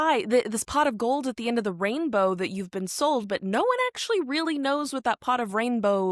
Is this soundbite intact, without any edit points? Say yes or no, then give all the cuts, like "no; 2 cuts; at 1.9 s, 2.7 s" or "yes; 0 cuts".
yes; 0 cuts